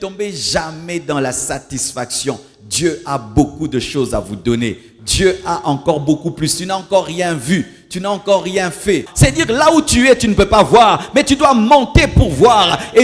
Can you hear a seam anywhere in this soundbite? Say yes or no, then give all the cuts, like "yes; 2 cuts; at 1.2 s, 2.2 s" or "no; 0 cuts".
yes; 1 cut; at 9.1 s